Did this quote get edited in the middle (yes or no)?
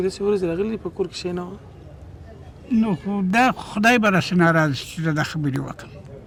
no